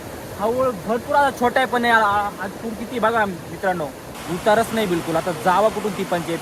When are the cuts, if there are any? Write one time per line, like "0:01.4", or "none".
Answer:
0:04.1